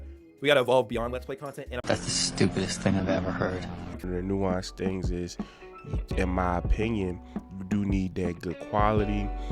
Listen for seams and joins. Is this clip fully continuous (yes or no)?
no